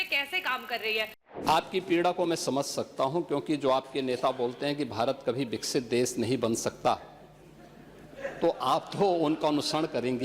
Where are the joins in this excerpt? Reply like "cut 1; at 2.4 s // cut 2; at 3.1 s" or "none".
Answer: cut 1; at 1.2 s